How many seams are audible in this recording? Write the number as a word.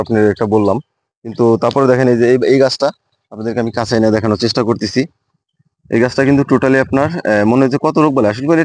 zero